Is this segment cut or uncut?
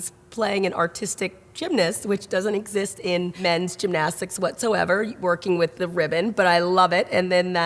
cut